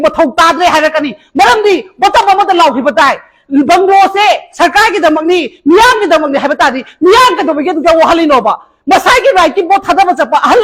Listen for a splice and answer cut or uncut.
uncut